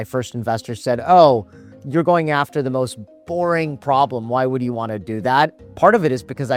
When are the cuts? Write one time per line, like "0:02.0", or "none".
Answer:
none